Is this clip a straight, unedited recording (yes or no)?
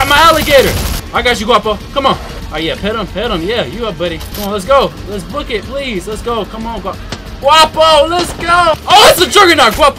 no